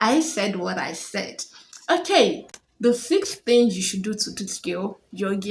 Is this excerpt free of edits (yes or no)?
yes